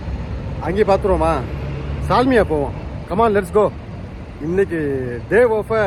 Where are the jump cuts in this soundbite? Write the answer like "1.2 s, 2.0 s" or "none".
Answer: none